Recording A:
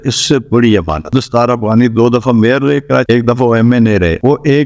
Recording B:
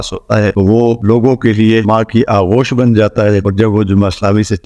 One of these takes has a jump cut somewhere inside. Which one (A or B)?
A